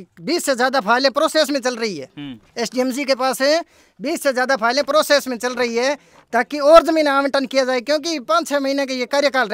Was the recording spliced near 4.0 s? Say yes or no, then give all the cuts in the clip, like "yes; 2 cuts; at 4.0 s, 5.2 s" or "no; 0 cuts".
no; 0 cuts